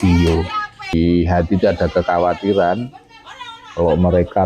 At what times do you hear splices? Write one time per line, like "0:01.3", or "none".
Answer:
0:00.9